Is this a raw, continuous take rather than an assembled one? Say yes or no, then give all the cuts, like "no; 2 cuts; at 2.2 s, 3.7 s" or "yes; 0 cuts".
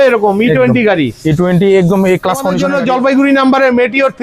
no; 1 cut; at 2.6 s